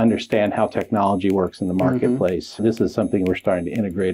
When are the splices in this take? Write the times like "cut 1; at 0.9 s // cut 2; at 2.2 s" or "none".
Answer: cut 1; at 2.6 s